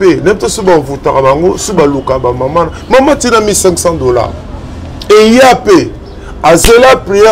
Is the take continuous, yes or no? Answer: yes